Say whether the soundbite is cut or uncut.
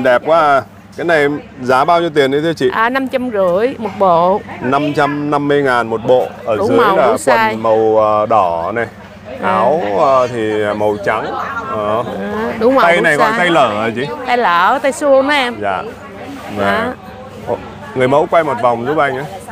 uncut